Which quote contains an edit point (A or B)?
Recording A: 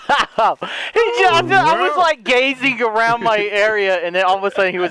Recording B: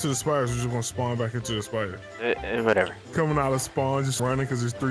B